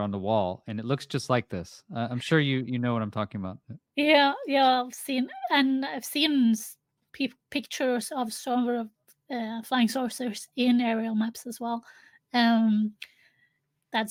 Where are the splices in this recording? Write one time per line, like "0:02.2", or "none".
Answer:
none